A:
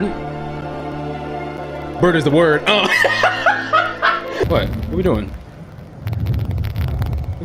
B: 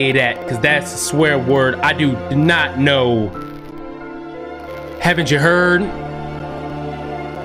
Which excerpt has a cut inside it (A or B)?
A